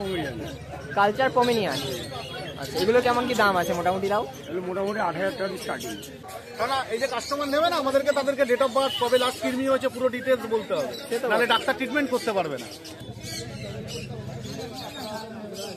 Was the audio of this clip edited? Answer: yes; 2 cuts; at 6.2 s, 13.0 s

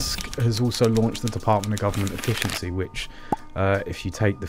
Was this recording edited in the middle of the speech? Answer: no; 0 cuts

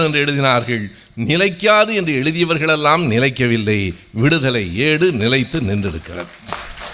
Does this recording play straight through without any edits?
yes; 0 cuts

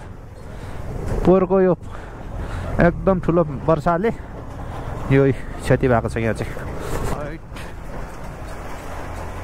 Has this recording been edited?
yes; 1 cut; at 7.1 s

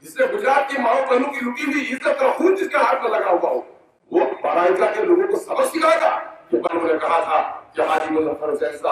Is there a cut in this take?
yes; 1 cut; at 6.7 s

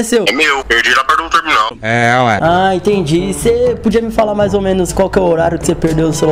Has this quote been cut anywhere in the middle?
no; 0 cuts

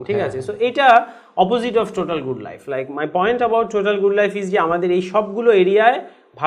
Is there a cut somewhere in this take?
no; 0 cuts

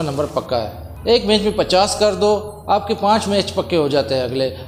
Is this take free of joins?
no; 1 cut; at 0.9 s

